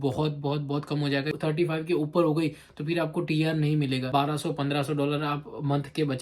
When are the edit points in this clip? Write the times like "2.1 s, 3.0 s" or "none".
1.3 s, 4.1 s